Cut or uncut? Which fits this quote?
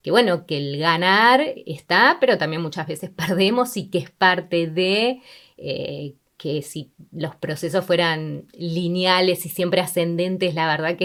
uncut